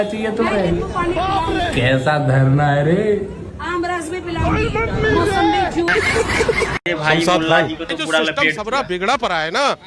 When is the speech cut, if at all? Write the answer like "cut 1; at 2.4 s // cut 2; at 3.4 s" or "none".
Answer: cut 1; at 6.8 s